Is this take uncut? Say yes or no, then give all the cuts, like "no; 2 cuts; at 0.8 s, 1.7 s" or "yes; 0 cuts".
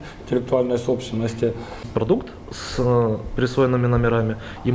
no; 1 cut; at 1.9 s